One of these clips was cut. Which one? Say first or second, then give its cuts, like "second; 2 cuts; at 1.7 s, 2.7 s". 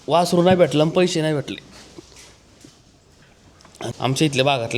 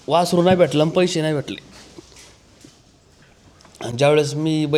first; 1 cut; at 3.8 s